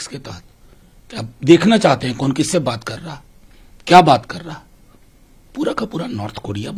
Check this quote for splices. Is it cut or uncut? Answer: uncut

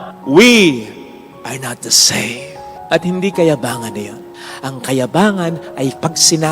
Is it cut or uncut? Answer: cut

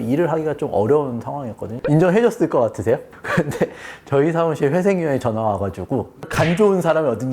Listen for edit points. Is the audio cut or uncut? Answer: cut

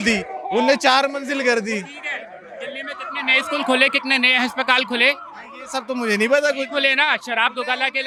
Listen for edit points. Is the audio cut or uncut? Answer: uncut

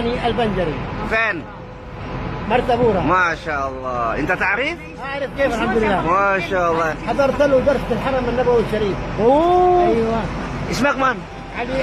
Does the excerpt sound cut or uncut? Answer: uncut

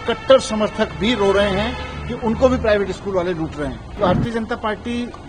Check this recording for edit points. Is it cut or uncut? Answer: cut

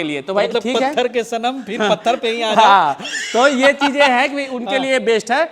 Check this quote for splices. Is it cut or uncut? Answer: uncut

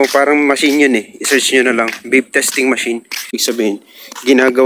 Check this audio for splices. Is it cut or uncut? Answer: cut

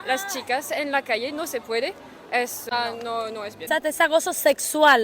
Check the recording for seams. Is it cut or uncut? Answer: cut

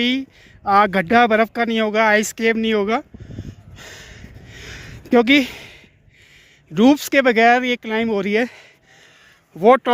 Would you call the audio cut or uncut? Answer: uncut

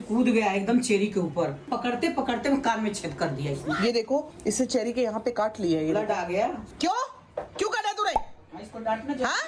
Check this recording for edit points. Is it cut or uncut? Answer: cut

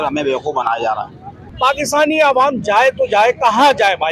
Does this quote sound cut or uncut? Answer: cut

